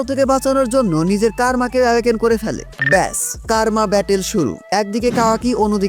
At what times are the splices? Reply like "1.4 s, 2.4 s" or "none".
none